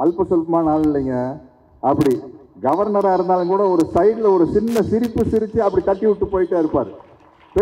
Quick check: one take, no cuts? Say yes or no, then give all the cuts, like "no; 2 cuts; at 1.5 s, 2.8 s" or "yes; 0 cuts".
yes; 0 cuts